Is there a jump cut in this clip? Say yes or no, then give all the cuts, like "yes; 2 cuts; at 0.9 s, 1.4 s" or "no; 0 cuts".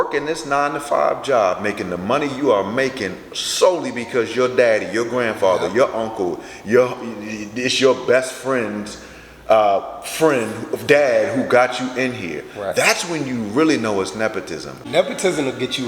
yes; 1 cut; at 14.8 s